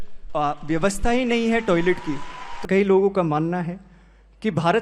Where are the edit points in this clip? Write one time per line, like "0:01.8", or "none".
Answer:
0:02.6